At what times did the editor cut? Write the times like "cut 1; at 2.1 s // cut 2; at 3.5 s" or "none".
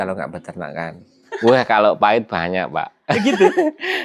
cut 1; at 1.3 s